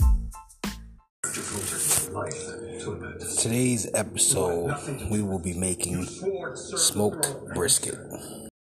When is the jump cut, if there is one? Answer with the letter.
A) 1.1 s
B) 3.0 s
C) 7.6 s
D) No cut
A